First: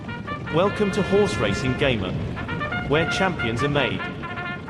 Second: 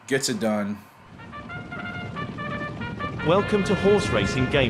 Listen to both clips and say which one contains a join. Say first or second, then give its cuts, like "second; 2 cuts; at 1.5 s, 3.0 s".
second; 1 cut; at 1.2 s